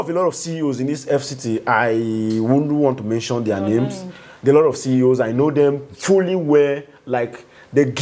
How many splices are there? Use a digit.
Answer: 0